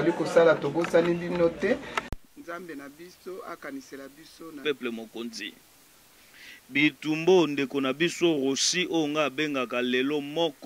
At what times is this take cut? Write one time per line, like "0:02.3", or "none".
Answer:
0:04.6